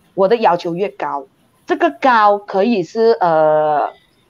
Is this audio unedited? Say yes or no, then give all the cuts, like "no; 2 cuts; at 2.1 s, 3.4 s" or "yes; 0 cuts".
yes; 0 cuts